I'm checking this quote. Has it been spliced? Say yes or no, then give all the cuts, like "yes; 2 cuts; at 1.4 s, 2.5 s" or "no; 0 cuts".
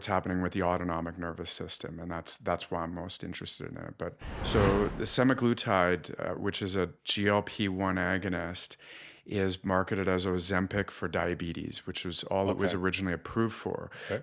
yes; 1 cut; at 4.3 s